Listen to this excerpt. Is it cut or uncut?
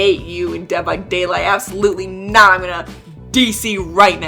uncut